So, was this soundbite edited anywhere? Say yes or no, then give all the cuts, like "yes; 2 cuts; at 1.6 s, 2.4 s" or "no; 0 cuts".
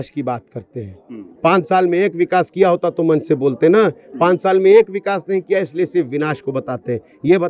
no; 0 cuts